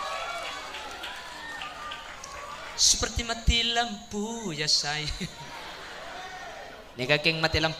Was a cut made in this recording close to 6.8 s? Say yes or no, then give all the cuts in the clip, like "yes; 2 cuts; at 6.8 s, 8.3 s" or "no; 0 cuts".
yes; 1 cut; at 6.8 s